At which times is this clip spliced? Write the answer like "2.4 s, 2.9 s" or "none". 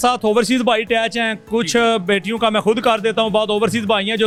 none